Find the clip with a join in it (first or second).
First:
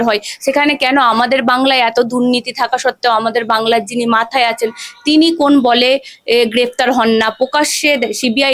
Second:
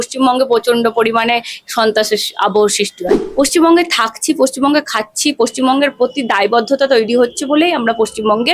second